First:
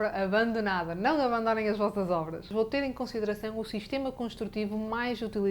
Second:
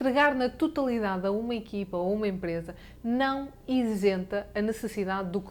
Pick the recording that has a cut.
first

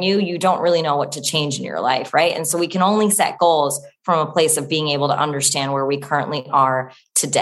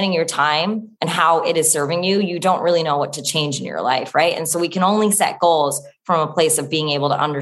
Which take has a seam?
second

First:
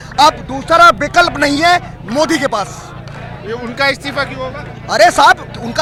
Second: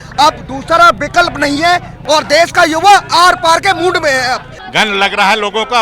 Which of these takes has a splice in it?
second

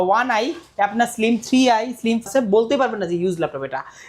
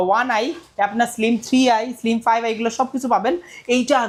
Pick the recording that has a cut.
first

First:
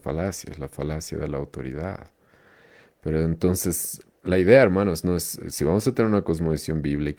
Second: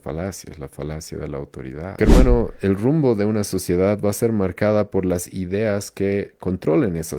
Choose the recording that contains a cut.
second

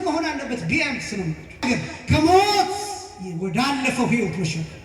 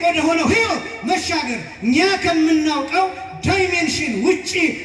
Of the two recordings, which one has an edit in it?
first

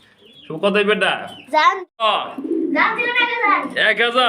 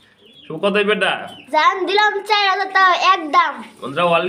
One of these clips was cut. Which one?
first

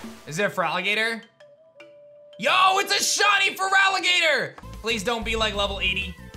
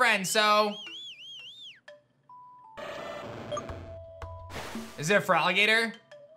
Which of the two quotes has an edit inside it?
first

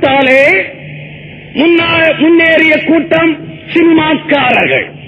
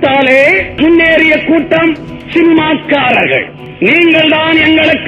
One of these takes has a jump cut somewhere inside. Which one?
second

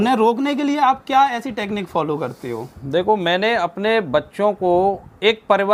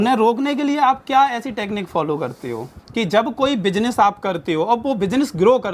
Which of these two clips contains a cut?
second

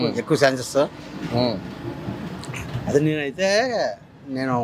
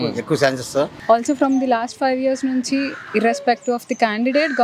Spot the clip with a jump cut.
second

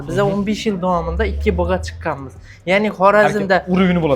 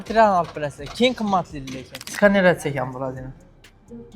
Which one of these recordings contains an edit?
second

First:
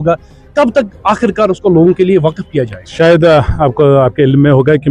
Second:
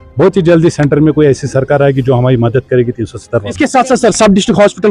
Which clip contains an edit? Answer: second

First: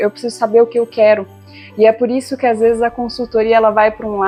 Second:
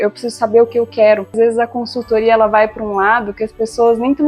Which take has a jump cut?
second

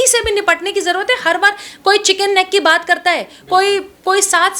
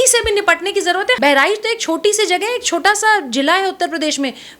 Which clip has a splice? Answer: second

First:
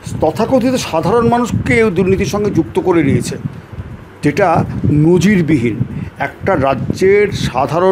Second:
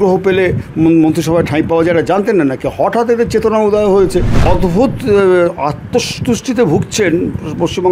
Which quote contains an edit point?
second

